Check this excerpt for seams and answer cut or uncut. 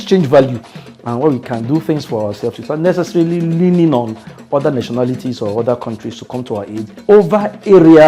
cut